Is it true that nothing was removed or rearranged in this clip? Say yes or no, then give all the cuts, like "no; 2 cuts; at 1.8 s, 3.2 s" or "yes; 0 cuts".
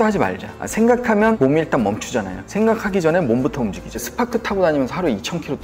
no; 2 cuts; at 1.4 s, 4.1 s